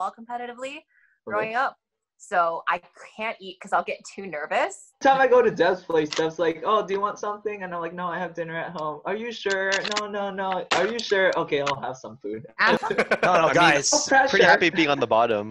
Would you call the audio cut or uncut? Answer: cut